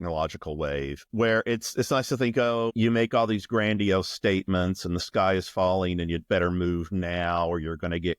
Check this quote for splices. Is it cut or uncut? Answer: cut